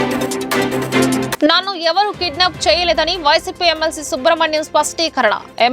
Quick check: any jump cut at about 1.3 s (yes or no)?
yes